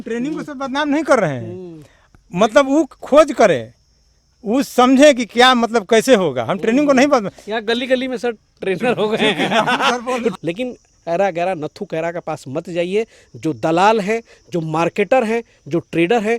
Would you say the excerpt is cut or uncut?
cut